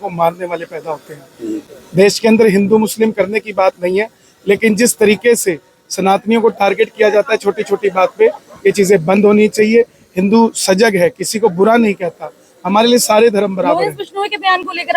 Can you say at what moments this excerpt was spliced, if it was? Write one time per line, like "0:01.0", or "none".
none